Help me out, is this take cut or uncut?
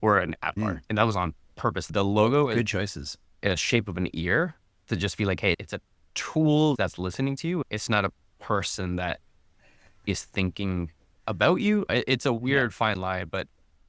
cut